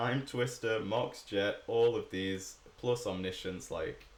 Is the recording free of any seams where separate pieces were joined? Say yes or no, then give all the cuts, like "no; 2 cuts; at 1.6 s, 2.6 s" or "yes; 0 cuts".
yes; 0 cuts